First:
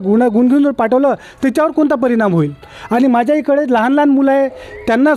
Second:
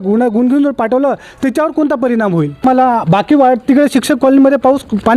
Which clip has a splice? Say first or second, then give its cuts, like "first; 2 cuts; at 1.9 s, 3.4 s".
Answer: second; 1 cut; at 2.6 s